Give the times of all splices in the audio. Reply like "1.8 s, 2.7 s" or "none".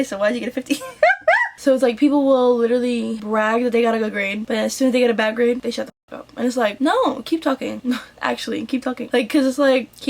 1.5 s